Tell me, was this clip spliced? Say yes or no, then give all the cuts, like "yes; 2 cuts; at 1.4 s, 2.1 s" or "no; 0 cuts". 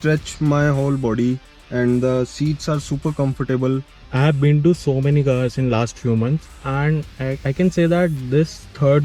yes; 1 cut; at 4.0 s